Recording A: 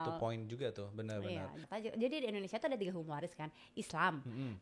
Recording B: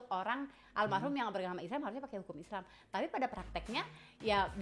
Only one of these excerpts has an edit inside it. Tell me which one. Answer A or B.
A